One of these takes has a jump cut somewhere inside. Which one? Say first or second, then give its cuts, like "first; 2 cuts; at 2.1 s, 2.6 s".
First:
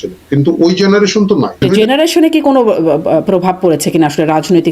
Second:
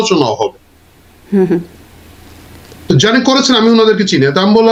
first; 1 cut; at 1.7 s